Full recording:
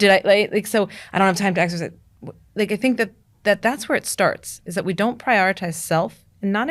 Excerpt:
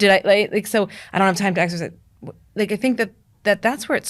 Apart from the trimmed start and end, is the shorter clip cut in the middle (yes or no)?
no